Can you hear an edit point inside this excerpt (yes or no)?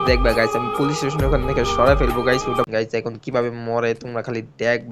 yes